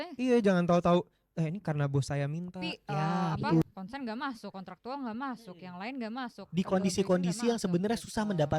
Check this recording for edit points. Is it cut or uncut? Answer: cut